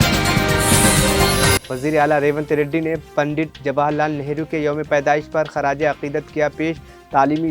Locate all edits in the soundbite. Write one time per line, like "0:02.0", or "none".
0:01.6